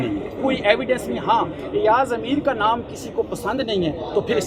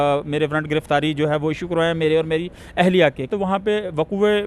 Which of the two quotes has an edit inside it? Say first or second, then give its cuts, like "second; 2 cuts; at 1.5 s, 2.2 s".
second; 1 cut; at 3.3 s